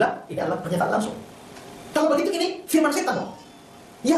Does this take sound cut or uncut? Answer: uncut